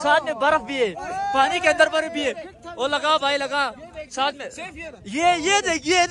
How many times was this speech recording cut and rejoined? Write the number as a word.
zero